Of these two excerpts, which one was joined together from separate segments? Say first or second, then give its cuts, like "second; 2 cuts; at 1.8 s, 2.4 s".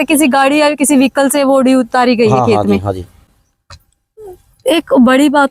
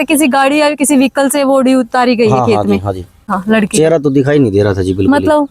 second; 1 cut; at 3.3 s